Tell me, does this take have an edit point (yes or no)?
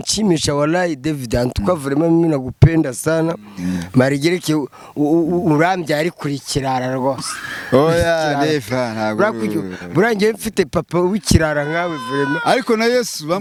no